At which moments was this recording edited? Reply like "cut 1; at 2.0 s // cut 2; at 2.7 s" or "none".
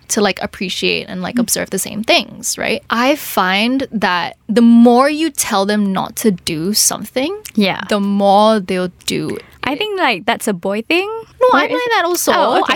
cut 1; at 2.8 s